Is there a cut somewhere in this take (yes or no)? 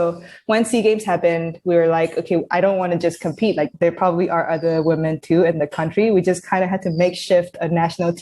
yes